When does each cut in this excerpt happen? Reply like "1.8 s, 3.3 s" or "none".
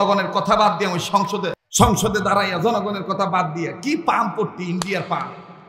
1.5 s